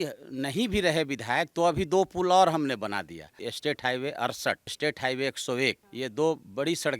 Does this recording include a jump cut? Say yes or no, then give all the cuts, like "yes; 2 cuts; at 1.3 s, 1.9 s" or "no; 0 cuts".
yes; 3 cuts; at 3.3 s, 4.7 s, 5.9 s